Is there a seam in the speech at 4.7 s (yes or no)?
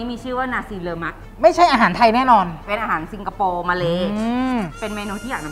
yes